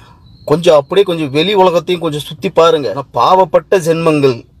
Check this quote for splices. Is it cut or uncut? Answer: cut